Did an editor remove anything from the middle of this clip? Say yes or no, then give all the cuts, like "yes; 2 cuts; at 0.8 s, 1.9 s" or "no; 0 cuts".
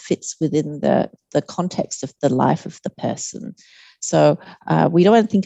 no; 0 cuts